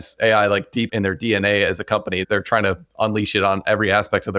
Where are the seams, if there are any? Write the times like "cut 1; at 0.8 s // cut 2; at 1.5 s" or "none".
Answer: cut 1; at 0.9 s // cut 2; at 2.2 s

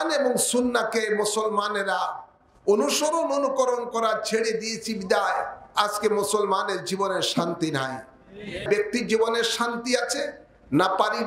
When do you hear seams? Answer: cut 1; at 8.6 s

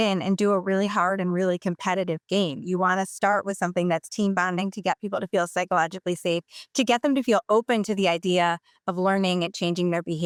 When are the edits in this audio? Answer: none

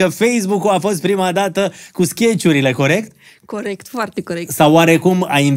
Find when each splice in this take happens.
none

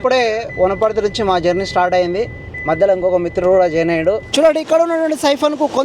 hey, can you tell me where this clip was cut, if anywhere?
cut 1; at 4.2 s

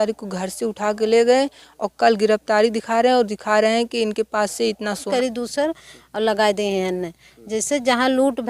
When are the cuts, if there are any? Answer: cut 1; at 5.1 s

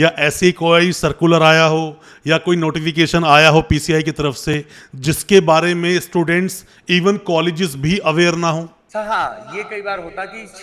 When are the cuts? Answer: cut 1; at 8.8 s

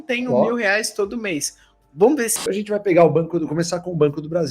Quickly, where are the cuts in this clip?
cut 1; at 2.3 s

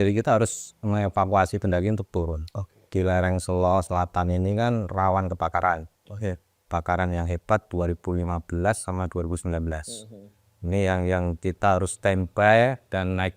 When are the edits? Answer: cut 1; at 2.9 s

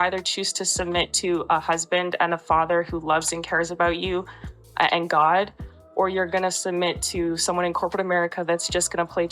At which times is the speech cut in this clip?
none

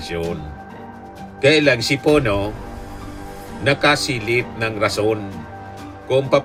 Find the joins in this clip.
none

